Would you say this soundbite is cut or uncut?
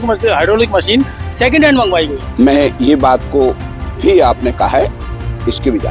cut